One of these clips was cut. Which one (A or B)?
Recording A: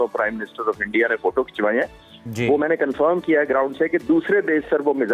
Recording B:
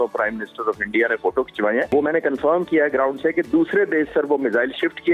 B